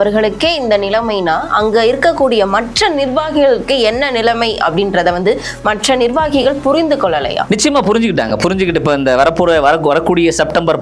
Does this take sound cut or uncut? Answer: uncut